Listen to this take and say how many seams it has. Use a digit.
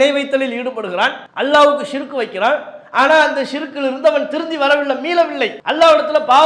2